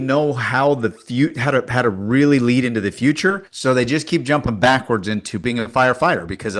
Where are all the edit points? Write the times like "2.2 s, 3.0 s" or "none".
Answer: 3.5 s, 5.3 s